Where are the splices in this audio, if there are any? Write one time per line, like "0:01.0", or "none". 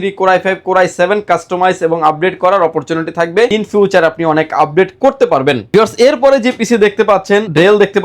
none

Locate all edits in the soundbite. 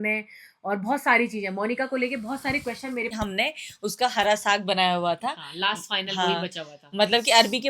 0:03.1

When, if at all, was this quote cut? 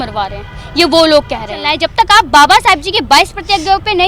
0:01.8

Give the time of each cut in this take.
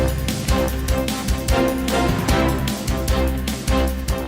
0:01.7

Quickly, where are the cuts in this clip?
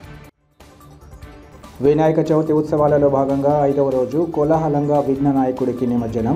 0:01.4

